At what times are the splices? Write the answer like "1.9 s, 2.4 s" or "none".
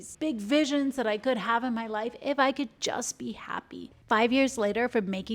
3.9 s

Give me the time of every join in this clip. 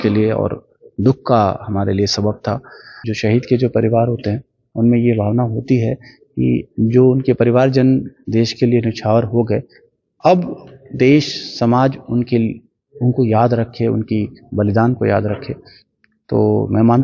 3.0 s

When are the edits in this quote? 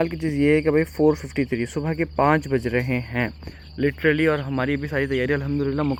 none

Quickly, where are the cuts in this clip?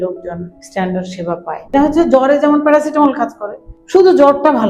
1.7 s

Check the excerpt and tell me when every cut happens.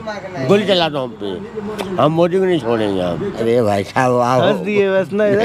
3.3 s

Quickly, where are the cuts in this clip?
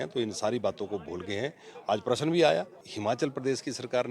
2.9 s

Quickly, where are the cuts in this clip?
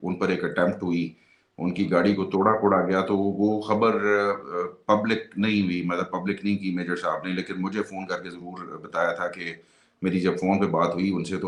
none

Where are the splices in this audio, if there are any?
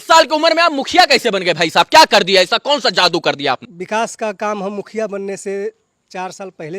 3.7 s

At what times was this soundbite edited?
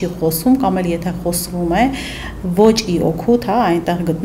none

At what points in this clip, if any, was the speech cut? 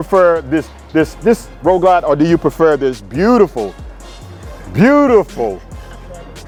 none

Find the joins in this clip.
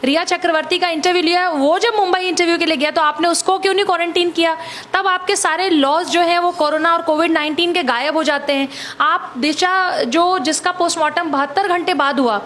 none

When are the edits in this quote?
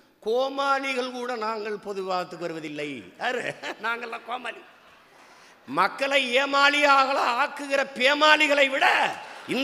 none

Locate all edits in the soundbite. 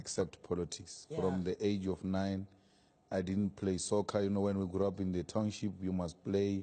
none

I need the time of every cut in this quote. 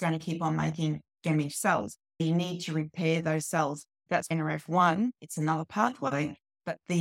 2.2 s, 4.1 s

